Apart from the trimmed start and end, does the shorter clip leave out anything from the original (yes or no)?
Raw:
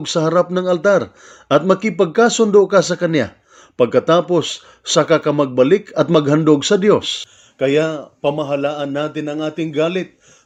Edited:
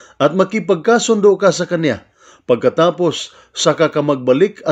no